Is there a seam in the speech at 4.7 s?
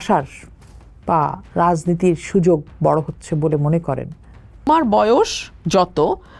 yes; 1 cut; at 4.7 s

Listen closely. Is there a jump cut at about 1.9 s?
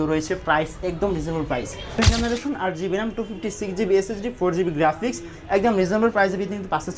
yes; 1 cut; at 1.9 s

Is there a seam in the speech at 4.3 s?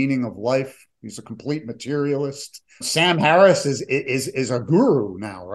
no; 1 cut; at 2.8 s

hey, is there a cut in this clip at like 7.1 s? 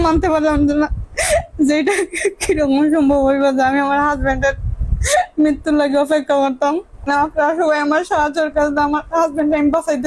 yes; 1 cut; at 7.1 s

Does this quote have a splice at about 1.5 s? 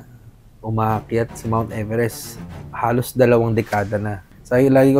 no; 1 cut; at 4.0 s

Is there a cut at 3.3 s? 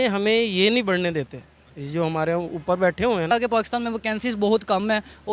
yes; 1 cut; at 3.3 s

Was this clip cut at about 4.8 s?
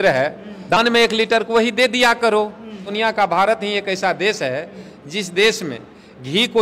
no; 2 cuts; at 0.8 s, 2.9 s

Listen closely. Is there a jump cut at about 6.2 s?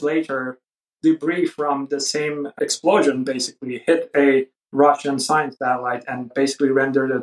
yes; 1 cut; at 6.2 s

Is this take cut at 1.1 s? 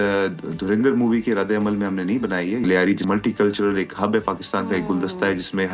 no; 1 cut; at 2.7 s

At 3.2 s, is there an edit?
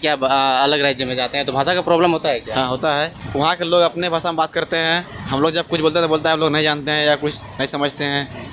yes; 1 cut; at 3.2 s

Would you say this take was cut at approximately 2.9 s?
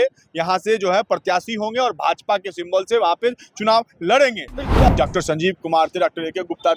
no; 1 cut; at 4.9 s

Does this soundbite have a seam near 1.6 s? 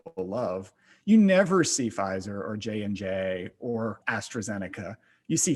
no; 1 cut; at 4.1 s

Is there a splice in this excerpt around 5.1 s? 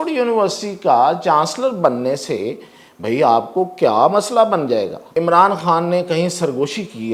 yes; 1 cut; at 5.1 s

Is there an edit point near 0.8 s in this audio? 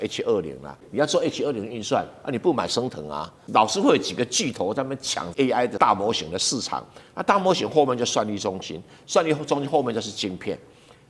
yes; 3 cuts; at 0.8 s, 3.4 s, 5.7 s

